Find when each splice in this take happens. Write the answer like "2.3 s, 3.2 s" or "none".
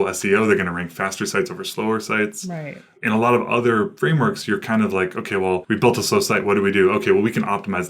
3.9 s, 5.6 s